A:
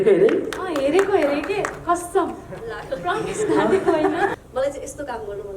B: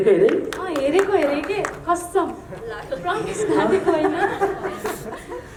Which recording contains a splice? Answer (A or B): A